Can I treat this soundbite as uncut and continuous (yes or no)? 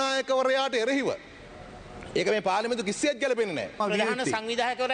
no